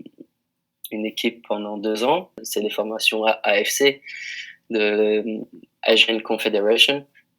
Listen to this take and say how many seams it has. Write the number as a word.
one